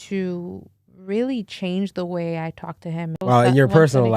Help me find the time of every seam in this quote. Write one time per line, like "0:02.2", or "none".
0:03.2

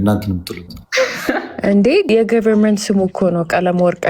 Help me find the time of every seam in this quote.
0:02.1

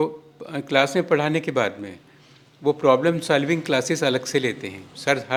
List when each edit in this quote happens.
none

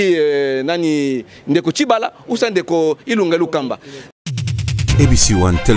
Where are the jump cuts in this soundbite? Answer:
0:04.1

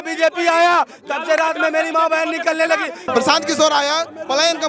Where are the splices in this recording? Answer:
0:03.0

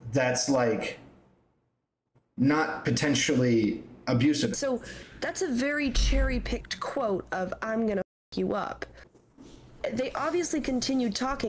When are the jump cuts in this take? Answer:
0:04.5

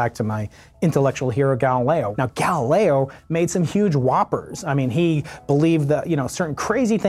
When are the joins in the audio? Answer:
0:02.1

